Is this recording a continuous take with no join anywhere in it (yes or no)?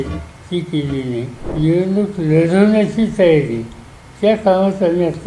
no